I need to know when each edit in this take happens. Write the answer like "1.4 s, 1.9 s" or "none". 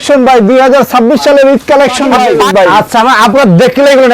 2.4 s